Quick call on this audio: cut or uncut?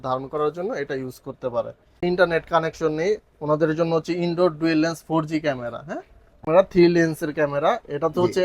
cut